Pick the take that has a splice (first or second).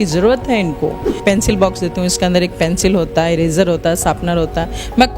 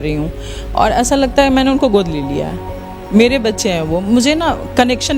first